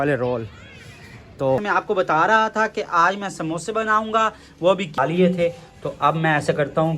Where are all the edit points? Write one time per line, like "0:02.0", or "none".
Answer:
0:01.6
0:04.9